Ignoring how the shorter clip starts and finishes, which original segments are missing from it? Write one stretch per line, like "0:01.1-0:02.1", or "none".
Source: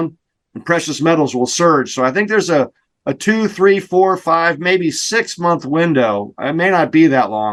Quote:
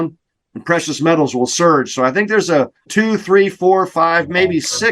0:02.8-0:03.1